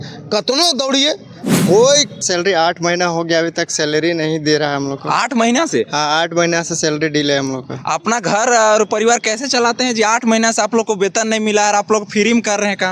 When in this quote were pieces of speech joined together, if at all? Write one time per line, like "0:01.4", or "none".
0:02.2